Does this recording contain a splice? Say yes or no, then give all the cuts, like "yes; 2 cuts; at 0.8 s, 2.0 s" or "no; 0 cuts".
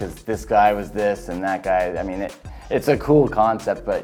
no; 0 cuts